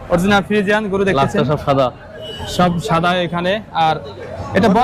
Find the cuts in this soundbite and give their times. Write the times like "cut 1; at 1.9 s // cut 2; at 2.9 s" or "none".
none